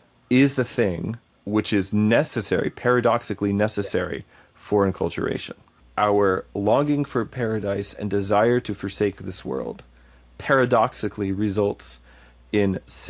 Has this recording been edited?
yes; 2 cuts; at 1.4 s, 5.8 s

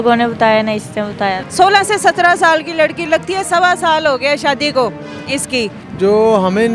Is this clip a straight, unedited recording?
no; 2 cuts; at 1.4 s, 5.8 s

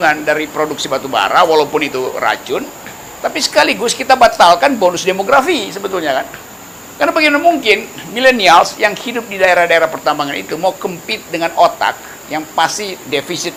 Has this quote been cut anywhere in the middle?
no; 0 cuts

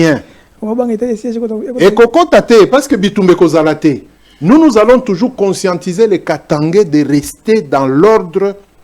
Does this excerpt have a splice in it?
no; 0 cuts

